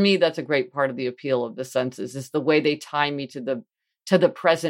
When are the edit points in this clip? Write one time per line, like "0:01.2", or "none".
none